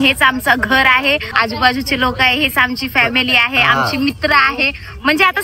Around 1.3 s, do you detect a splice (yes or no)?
yes